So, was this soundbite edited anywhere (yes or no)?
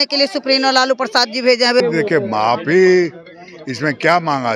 yes